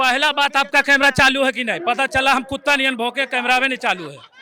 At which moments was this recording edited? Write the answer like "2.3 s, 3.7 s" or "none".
none

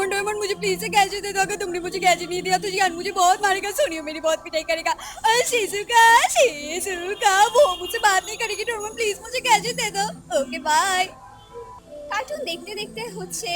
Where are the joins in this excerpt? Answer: 11.8 s

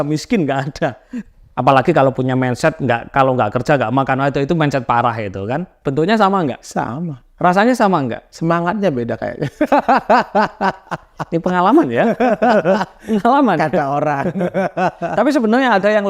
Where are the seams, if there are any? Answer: 1.1 s, 5.8 s, 6.6 s, 8.3 s

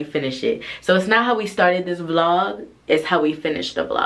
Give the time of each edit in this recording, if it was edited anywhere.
none

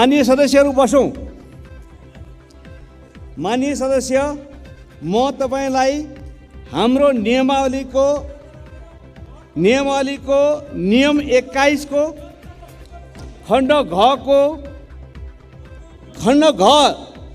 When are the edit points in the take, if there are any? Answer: 1.5 s, 3.4 s, 14.8 s, 16.1 s

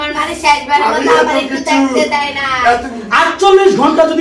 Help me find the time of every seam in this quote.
3.0 s

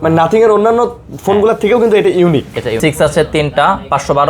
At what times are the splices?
2.8 s

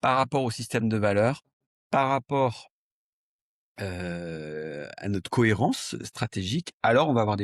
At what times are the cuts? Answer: none

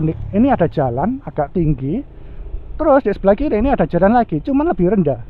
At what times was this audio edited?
none

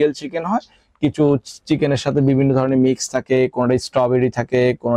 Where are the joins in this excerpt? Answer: none

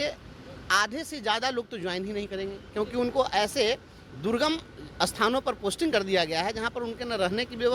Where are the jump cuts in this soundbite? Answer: none

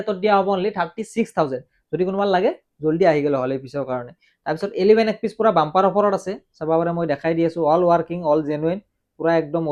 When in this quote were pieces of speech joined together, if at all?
none

